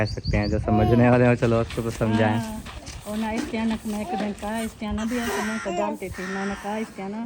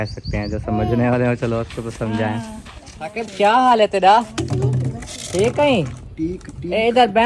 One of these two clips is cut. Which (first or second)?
second